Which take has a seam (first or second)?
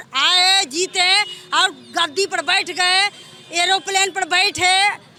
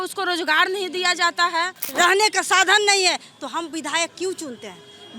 second